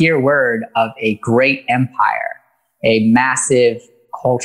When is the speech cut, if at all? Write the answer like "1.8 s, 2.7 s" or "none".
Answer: none